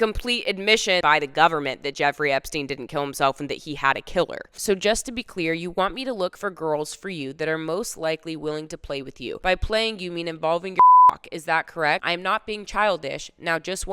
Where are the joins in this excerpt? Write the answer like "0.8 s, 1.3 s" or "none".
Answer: 1.0 s, 4.5 s

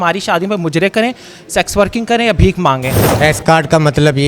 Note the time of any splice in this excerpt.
3.2 s

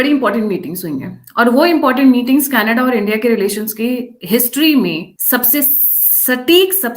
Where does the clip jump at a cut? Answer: 5.1 s

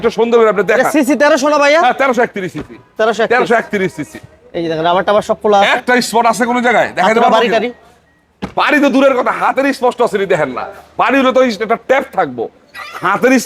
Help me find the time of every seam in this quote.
none

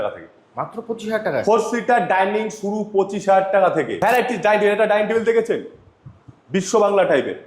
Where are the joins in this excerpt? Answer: 3.9 s

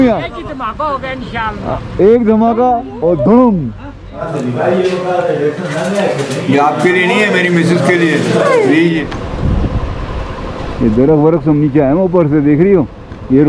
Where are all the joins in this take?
4.3 s, 9.1 s

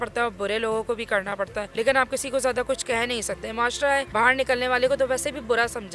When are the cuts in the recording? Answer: none

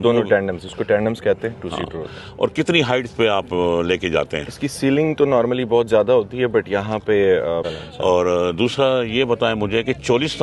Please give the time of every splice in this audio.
7.8 s

